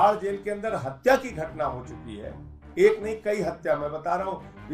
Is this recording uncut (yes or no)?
yes